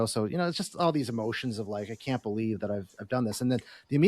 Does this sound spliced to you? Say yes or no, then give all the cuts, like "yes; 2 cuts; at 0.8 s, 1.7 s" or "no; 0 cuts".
no; 0 cuts